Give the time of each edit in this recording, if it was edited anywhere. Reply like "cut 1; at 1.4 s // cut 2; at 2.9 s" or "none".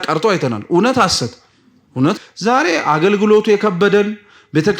cut 1; at 2.2 s